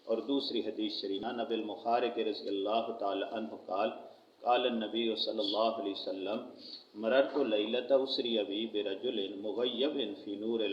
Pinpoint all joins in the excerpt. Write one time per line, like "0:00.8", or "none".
0:01.2